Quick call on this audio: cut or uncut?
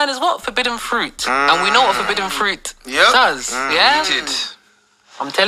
uncut